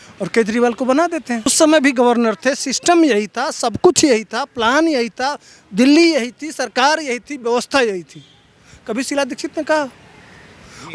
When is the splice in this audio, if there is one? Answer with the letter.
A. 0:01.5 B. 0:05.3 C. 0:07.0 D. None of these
A